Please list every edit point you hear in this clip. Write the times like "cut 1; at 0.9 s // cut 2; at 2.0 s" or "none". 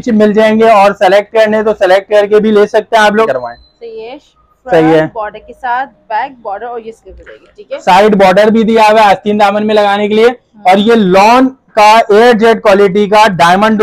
cut 1; at 3.3 s